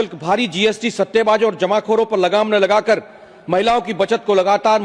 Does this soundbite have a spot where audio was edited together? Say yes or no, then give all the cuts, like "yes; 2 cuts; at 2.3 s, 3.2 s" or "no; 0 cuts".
no; 0 cuts